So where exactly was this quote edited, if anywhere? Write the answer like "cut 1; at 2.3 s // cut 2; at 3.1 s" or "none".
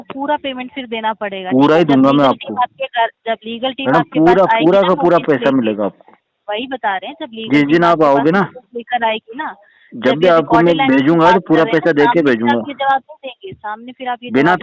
none